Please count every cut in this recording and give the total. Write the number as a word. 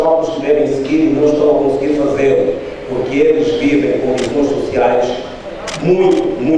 zero